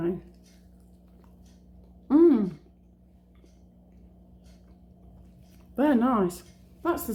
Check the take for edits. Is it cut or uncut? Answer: uncut